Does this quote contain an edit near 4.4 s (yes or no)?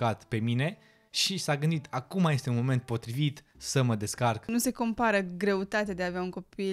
yes